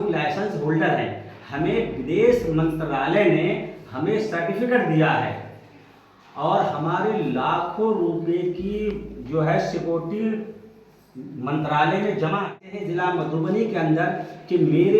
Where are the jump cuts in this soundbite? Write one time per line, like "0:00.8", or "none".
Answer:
0:12.7